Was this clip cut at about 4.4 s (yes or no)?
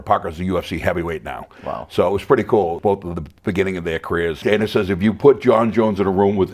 yes